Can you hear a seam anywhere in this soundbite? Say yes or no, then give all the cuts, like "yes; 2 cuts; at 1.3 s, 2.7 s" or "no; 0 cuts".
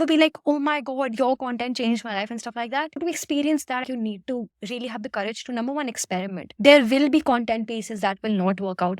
yes; 1 cut; at 3.8 s